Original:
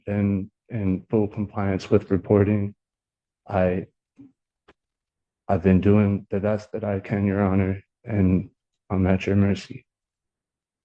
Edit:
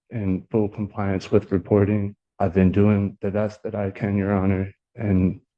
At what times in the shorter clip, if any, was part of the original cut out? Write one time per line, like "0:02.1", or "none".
0:02.2